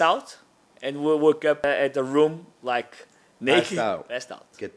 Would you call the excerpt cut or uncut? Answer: cut